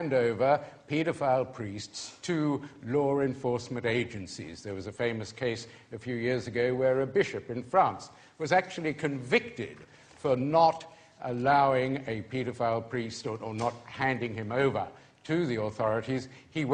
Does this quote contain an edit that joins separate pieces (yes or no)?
yes